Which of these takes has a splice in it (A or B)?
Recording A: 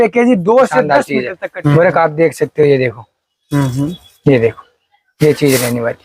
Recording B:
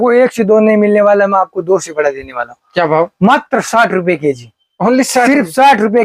A